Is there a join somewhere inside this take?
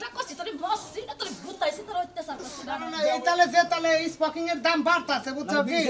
yes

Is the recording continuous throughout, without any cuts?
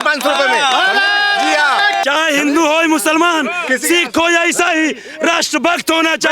no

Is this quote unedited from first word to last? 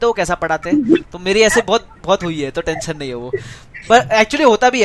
yes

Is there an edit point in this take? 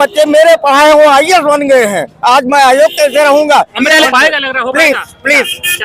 yes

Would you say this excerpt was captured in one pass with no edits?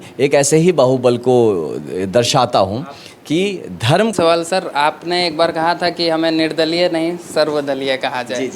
no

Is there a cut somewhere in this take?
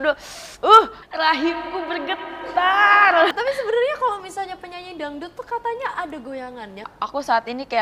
yes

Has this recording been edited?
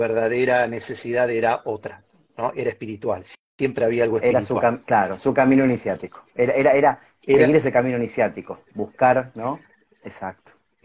no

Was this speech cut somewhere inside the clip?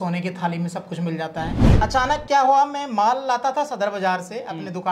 yes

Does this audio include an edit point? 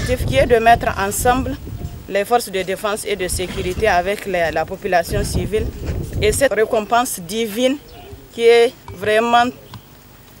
yes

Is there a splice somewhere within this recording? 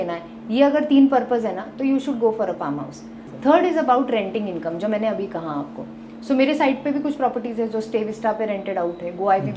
yes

